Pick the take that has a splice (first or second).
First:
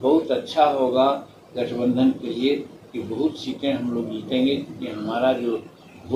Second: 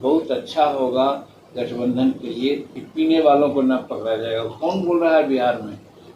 second